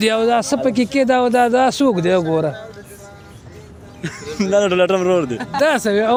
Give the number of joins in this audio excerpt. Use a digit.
0